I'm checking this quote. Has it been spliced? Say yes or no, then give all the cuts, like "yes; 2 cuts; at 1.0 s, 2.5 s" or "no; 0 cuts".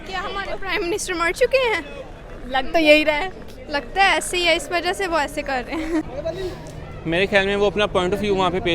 yes; 1 cut; at 6.0 s